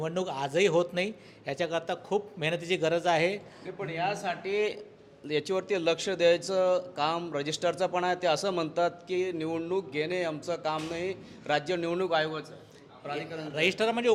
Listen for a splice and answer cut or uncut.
uncut